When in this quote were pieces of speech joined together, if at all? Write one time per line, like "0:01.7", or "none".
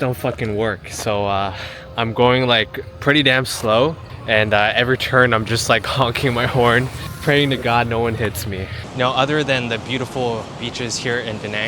0:04.1
0:07.0
0:08.8